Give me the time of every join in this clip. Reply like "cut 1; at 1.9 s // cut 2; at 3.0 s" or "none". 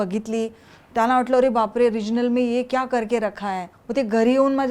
cut 1; at 3.7 s